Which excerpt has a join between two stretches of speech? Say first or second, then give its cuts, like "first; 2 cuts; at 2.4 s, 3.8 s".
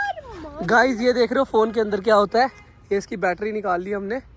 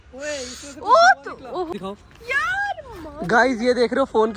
second; 1 cut; at 1.7 s